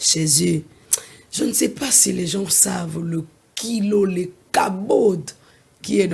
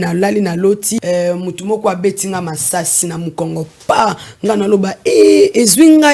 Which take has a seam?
second; 2 cuts; at 1.0 s, 3.0 s

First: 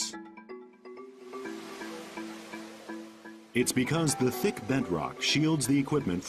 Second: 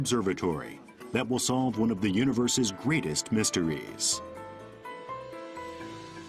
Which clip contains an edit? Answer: first; 1 cut; at 1.3 s

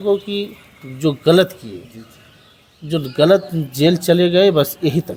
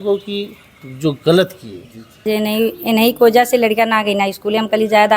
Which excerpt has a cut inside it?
second; 1 cut; at 2.2 s

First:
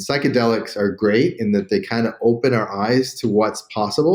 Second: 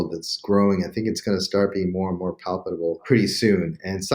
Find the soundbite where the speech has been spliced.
second; 1 cut; at 3.0 s

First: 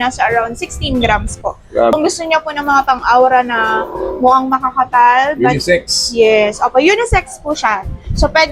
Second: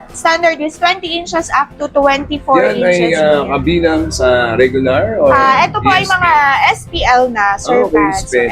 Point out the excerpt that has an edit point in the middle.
first; 1 cut; at 1.9 s

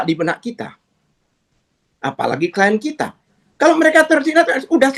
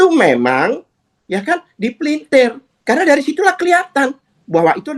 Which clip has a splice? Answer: second; 1 cut; at 2.7 s

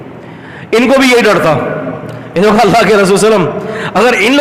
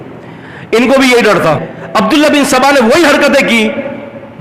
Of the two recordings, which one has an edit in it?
second; 1 cut; at 1.7 s

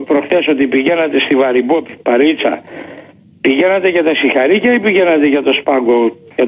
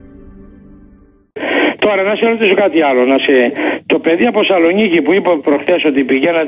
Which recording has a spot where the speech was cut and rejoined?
first; 1 cut; at 4.0 s

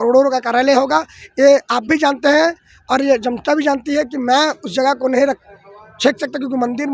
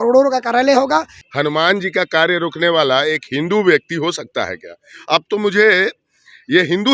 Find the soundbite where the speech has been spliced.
second; 1 cut; at 1.2 s

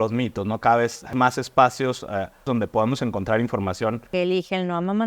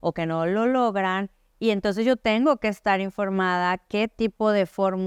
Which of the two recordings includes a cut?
first; 3 cuts; at 1.1 s, 2.5 s, 4.1 s

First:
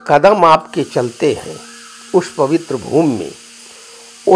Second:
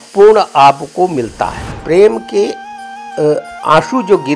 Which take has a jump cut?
second; 1 cut; at 1.7 s

